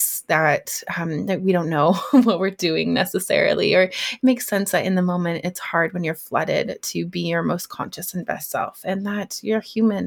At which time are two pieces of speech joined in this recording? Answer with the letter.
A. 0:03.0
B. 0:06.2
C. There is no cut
C